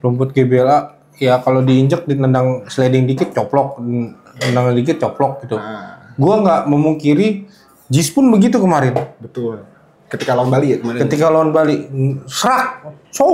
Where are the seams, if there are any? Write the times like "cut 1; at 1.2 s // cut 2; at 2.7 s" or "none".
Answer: none